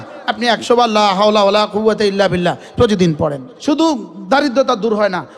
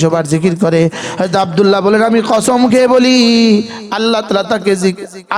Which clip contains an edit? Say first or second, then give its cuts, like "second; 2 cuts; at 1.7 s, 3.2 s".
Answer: first; 1 cut; at 3.5 s